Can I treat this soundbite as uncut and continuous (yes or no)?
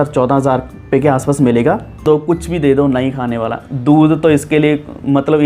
no